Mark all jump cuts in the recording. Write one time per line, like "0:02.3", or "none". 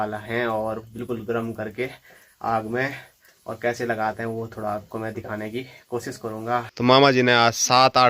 0:06.7